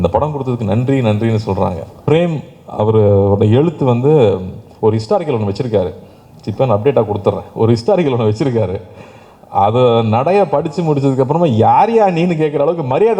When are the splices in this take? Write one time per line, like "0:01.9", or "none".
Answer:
0:02.0